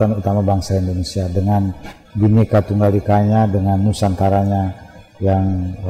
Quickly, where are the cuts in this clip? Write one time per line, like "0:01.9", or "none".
none